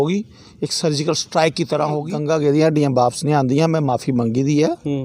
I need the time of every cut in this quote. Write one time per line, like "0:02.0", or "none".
0:02.1